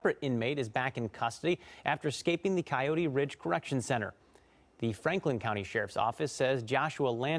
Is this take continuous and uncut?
yes; 0 cuts

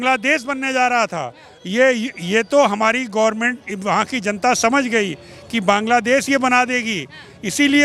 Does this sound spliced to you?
no; 0 cuts

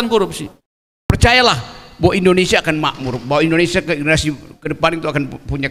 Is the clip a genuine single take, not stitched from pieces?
no; 1 cut; at 1.1 s

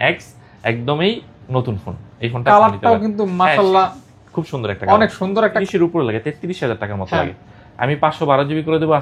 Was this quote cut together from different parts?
yes; 1 cut; at 5.6 s

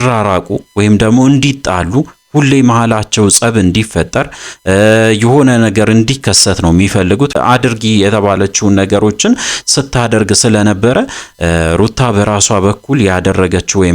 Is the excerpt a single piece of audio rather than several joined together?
no; 1 cut; at 7.3 s

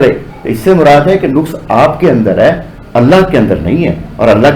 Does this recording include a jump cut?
no; 0 cuts

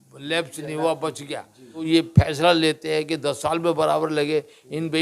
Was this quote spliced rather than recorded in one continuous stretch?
yes; 1 cut; at 1.9 s

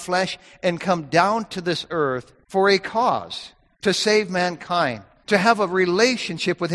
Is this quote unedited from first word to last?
no; 2 cuts; at 2.3 s, 5.1 s

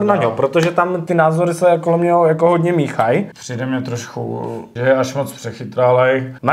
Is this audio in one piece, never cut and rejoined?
no; 3 cuts; at 1.0 s, 3.4 s, 4.7 s

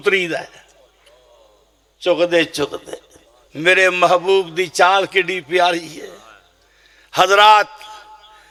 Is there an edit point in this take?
no; 0 cuts

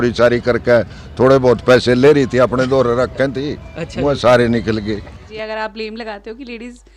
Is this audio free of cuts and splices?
no; 1 cut; at 5.2 s

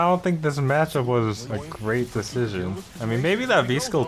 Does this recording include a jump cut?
yes; 2 cuts; at 1.4 s, 2.9 s

